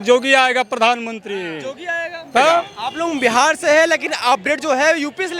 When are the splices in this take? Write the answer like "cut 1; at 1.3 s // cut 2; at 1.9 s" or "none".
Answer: cut 1; at 2.8 s

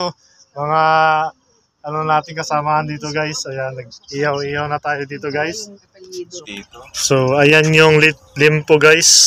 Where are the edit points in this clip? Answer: cut 1; at 6.3 s

